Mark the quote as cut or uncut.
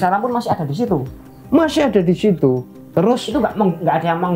cut